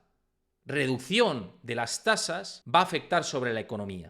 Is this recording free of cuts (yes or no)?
no